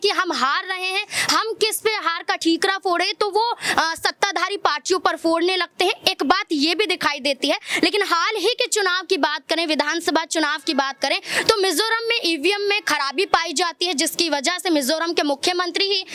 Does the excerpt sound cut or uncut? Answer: uncut